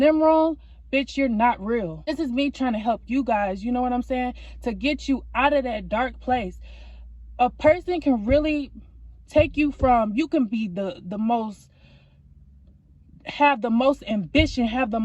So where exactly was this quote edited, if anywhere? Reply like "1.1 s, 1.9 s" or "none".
2.1 s